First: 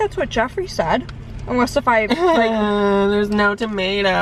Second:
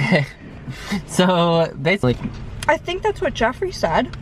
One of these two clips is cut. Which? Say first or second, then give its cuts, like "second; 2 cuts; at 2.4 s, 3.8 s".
second; 1 cut; at 2.0 s